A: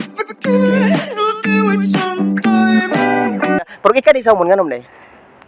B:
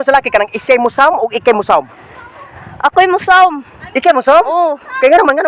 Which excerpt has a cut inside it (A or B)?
A